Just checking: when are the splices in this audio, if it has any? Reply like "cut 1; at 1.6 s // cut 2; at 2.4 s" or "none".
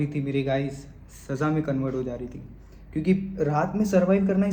none

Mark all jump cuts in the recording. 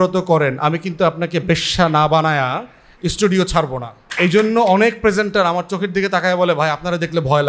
cut 1; at 4.0 s

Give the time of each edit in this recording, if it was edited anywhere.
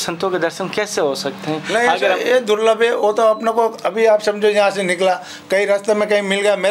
none

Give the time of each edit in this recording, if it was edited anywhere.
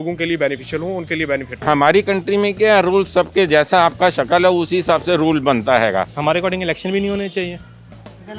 cut 1; at 1.5 s // cut 2; at 6.1 s

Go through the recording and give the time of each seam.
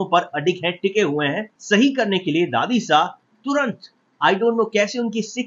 cut 1; at 1.5 s

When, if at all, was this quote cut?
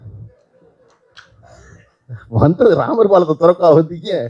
none

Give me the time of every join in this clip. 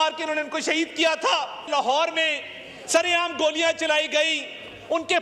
cut 1; at 1.5 s

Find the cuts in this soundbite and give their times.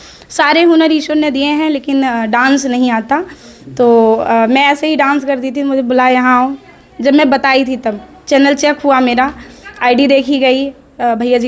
none

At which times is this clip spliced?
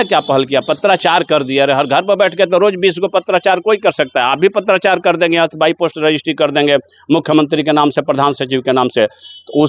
none

